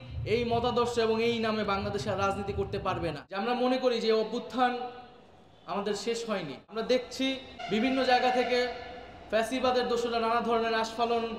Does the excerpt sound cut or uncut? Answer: cut